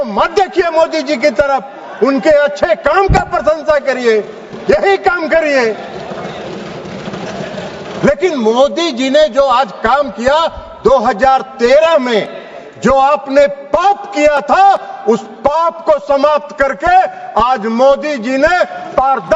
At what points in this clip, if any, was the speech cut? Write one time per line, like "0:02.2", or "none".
none